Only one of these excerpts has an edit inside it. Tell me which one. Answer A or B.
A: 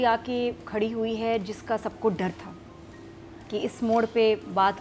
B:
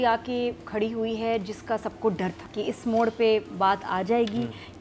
B